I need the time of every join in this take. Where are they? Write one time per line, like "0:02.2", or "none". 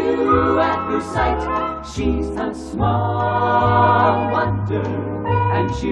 none